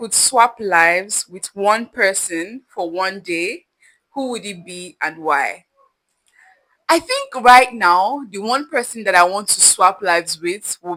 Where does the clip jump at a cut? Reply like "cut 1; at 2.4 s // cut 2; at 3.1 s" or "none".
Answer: none